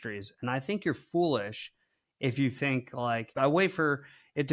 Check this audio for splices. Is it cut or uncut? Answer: cut